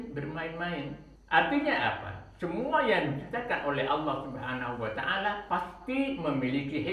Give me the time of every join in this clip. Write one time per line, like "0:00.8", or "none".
0:01.1
0:05.4